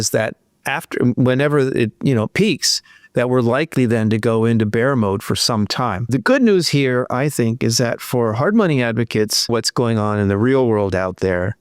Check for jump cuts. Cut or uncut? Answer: cut